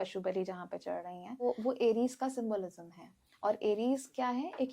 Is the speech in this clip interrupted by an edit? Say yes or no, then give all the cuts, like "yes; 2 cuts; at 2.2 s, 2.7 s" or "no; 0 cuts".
yes; 1 cut; at 1.4 s